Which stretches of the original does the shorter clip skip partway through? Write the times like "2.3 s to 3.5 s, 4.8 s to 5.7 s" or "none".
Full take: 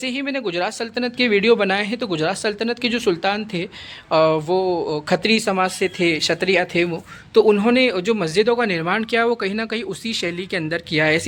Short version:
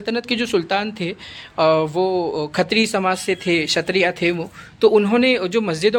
none